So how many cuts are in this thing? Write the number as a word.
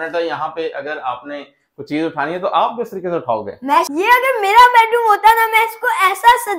one